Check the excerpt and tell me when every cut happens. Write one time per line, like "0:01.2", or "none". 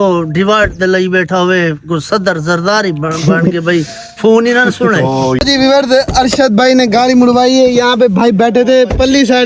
0:05.4